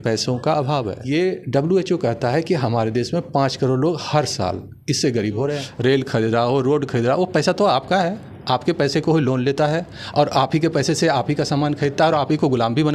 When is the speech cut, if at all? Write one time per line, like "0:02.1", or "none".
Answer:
0:01.0
0:05.7